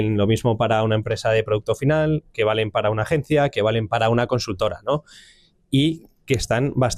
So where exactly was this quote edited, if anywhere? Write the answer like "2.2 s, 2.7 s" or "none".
none